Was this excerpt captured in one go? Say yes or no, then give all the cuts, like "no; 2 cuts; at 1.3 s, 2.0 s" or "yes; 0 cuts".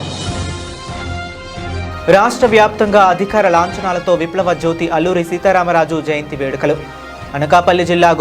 no; 1 cut; at 1.9 s